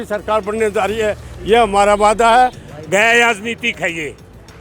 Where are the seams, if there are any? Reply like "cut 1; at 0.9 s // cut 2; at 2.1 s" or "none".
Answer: cut 1; at 2.7 s